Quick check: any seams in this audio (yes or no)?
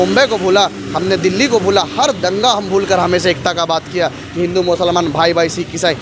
no